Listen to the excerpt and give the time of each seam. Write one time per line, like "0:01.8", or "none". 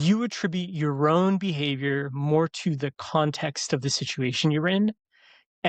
none